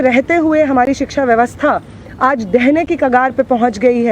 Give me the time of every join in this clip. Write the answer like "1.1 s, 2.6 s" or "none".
none